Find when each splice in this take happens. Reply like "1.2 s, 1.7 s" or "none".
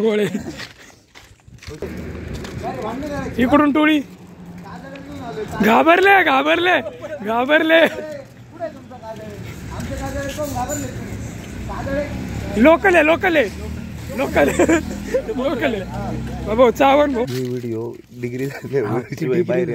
1.8 s, 17.3 s